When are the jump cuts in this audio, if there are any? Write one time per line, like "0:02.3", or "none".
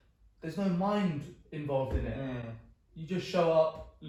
none